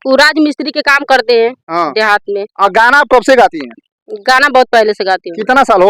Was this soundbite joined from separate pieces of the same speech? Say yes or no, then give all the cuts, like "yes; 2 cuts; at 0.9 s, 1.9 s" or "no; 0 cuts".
no; 0 cuts